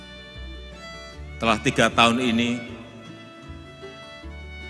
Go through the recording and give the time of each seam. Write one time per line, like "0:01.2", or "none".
0:01.4
0:03.0